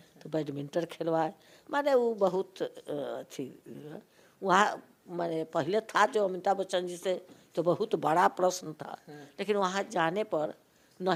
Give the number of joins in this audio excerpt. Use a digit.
0